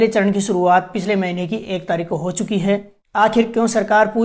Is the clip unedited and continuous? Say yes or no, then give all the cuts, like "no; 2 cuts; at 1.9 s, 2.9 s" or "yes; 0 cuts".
no; 1 cut; at 3.0 s